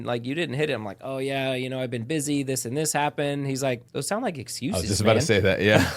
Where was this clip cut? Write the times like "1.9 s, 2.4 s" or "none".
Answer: 3.9 s